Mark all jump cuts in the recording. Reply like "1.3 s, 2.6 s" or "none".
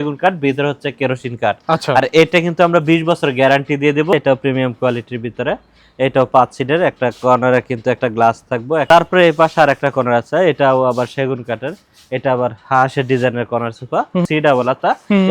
4.1 s, 8.9 s, 14.2 s